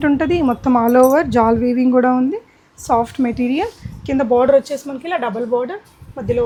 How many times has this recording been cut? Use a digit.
0